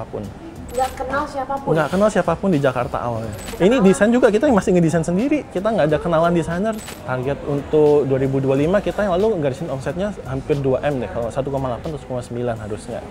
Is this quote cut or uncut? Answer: cut